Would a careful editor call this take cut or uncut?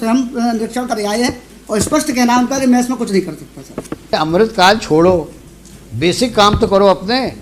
cut